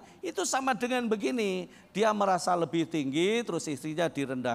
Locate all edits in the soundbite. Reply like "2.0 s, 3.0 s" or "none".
none